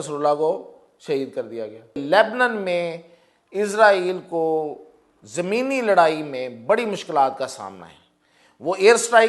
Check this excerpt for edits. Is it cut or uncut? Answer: cut